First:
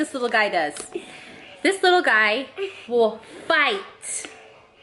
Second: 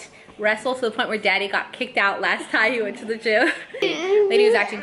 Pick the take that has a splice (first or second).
second